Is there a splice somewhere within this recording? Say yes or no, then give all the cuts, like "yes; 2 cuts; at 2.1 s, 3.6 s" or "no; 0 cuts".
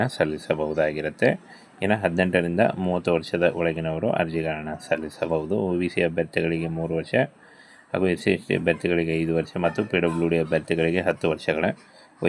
no; 0 cuts